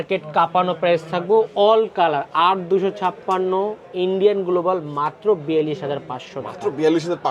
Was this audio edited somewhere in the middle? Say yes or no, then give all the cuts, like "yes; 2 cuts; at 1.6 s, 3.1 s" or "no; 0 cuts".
no; 0 cuts